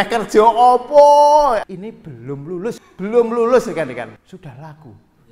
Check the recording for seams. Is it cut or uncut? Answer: cut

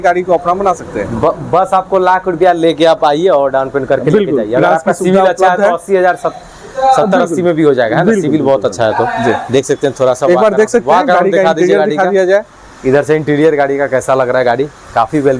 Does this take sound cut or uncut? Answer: uncut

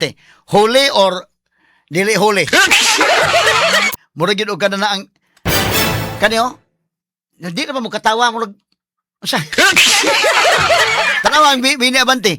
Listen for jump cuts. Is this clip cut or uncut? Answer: cut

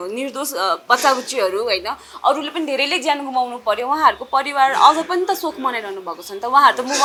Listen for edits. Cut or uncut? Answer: uncut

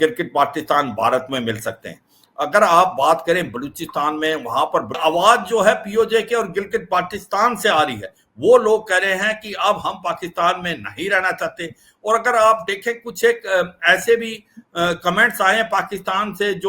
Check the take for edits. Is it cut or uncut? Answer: cut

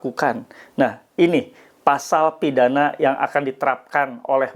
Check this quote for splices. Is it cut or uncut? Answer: uncut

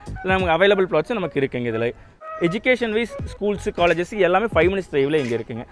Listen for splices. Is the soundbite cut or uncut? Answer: cut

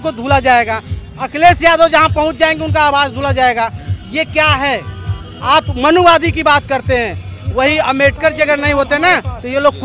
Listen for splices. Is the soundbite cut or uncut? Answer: uncut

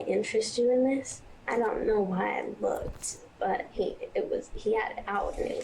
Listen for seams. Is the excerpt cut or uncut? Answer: cut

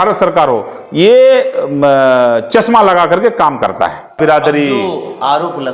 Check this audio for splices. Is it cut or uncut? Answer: uncut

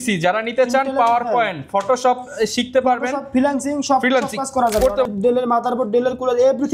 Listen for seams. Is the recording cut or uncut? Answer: cut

